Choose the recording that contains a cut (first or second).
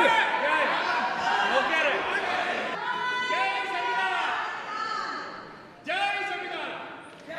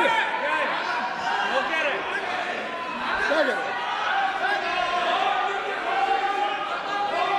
first